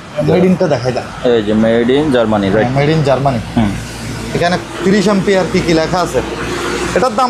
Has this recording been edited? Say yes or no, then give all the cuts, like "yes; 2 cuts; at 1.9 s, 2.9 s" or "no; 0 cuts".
no; 0 cuts